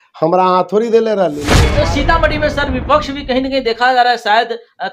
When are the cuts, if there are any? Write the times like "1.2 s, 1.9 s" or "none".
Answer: 1.6 s